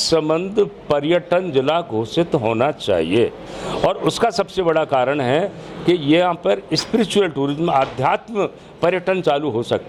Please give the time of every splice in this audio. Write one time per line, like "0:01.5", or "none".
none